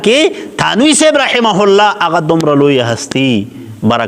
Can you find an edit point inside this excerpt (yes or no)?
no